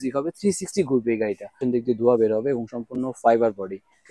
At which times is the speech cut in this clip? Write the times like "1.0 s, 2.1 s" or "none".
1.5 s

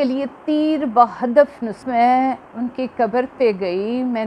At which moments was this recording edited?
1.8 s

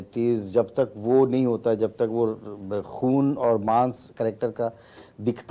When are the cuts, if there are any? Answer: none

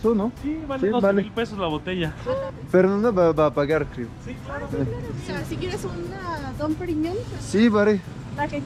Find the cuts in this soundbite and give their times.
none

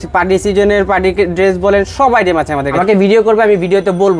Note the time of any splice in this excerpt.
2.7 s

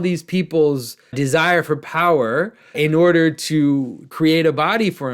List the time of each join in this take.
1.2 s, 2.7 s, 4.0 s

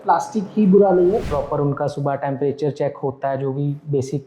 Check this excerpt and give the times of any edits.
1.3 s

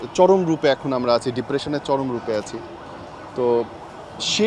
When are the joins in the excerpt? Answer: none

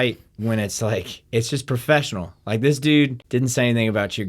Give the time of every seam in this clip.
3.2 s

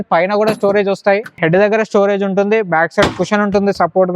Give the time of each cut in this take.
1.3 s

